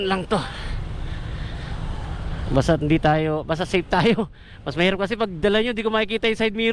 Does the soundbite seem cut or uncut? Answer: uncut